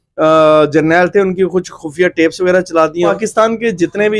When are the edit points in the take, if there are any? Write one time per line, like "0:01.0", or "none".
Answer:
0:03.1